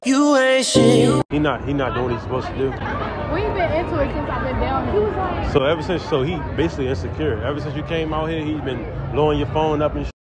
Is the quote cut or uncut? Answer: cut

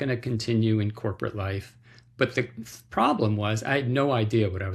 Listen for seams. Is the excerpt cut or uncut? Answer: uncut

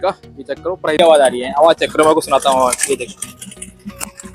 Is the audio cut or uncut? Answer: cut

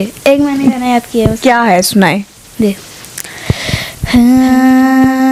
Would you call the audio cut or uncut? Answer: uncut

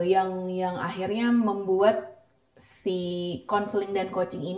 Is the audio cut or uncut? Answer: uncut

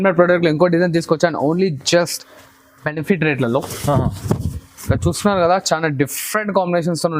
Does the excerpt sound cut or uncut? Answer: uncut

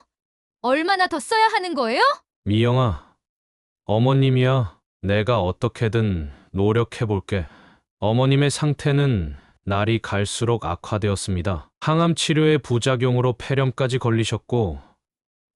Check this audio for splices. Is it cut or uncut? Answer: uncut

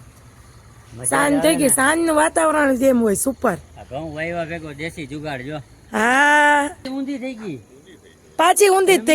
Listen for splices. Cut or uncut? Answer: cut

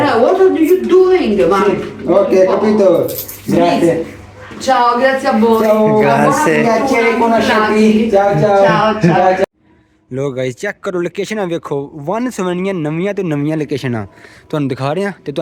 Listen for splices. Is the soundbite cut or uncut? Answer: uncut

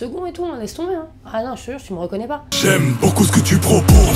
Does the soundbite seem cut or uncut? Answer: cut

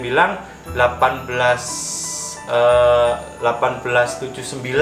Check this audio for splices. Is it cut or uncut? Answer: uncut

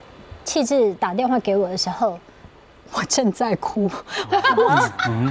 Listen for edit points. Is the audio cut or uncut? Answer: cut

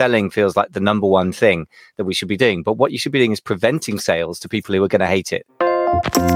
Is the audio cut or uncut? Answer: cut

